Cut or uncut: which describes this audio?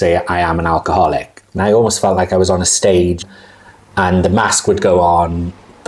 cut